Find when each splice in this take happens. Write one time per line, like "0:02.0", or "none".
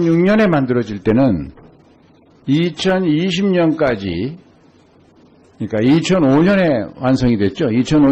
none